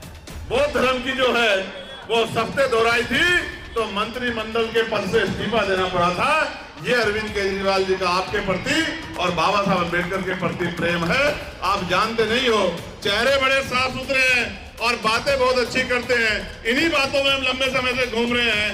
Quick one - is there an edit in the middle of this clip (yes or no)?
no